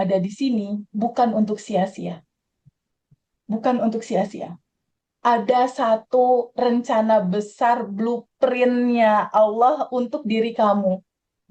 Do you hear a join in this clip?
no; 0 cuts

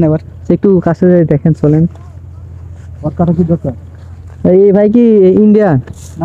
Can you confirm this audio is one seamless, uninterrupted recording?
yes; 0 cuts

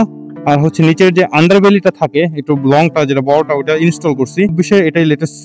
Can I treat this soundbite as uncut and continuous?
no; 1 cut; at 4.5 s

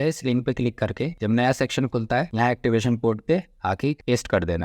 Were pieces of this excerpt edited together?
no; 0 cuts

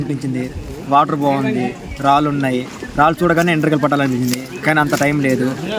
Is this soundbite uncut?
yes; 0 cuts

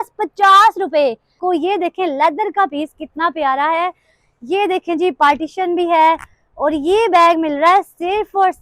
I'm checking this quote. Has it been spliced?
yes; 1 cut; at 1.4 s

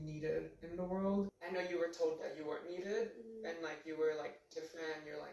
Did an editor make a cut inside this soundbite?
yes; 1 cut; at 1.4 s

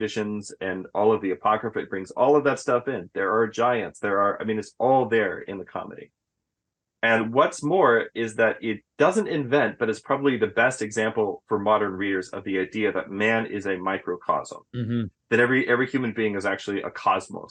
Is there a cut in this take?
no; 0 cuts

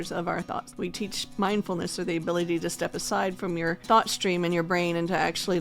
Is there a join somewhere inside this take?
yes; 2 cuts; at 0.8 s, 3.8 s

